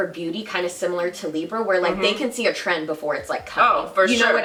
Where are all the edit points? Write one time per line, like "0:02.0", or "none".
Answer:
none